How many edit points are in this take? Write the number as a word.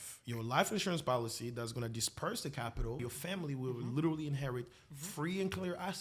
one